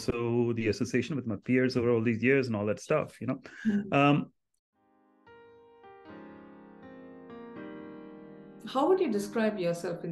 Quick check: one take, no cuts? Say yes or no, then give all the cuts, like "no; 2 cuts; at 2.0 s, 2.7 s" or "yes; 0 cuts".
no; 1 cut; at 4.6 s